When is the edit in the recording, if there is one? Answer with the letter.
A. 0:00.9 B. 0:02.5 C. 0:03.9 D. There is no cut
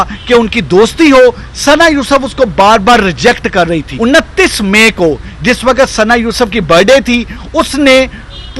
C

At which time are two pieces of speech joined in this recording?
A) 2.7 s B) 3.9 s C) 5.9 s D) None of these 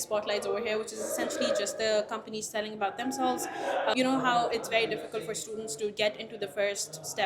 B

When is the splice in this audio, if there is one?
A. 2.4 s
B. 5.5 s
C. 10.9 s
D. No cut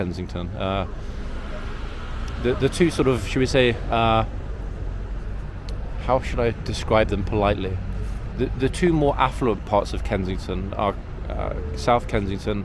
D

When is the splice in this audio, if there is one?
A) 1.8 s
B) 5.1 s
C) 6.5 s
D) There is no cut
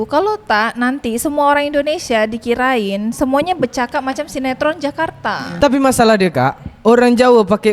D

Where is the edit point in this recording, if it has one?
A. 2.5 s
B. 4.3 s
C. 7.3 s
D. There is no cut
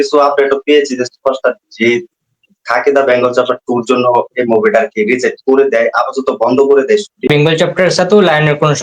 C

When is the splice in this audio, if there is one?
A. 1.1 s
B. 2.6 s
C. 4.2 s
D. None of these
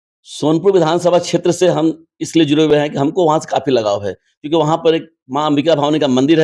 D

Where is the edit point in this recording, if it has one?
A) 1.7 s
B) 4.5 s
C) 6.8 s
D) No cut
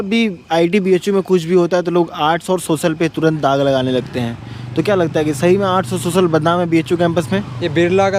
D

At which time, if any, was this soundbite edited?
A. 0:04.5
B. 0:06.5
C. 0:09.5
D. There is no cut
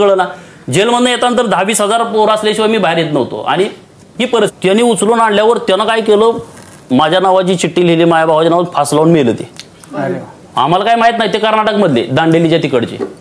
A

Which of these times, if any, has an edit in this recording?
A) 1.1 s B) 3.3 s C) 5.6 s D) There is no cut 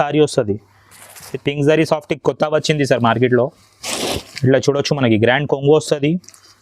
A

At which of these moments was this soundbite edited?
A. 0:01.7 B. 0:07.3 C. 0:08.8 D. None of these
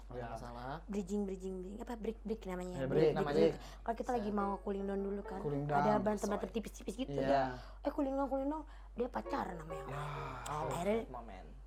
D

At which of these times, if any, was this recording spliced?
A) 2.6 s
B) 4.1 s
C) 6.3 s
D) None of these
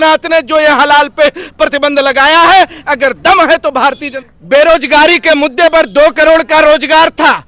B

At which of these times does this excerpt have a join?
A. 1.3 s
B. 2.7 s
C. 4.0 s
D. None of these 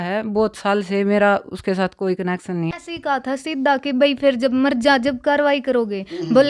B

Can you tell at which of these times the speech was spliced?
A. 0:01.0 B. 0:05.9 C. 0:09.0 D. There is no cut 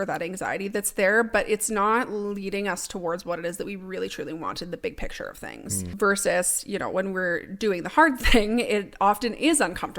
B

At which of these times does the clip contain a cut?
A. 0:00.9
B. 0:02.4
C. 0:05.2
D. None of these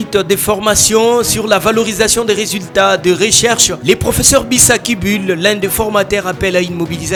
D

